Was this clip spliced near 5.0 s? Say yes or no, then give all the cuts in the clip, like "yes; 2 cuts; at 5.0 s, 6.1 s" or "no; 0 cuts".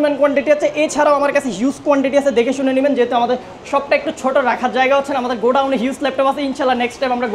no; 0 cuts